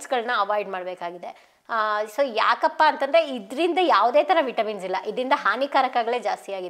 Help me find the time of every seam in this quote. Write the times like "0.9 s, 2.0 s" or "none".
none